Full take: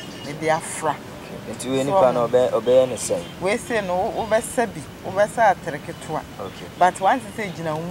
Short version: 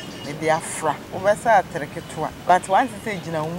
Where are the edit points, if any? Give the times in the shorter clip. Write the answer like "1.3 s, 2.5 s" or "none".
1.1 s, 2.2 s